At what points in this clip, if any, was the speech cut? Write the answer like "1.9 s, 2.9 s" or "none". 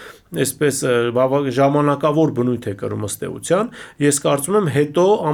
none